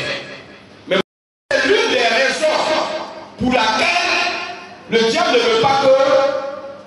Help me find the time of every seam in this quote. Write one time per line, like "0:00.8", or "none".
0:01.0